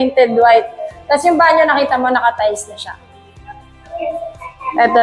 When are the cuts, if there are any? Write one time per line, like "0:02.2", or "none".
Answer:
none